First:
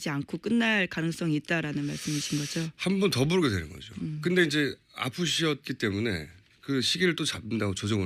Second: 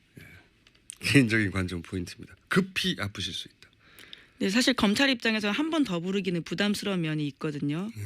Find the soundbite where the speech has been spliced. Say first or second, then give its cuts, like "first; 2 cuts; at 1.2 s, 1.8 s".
second; 1 cut; at 6.3 s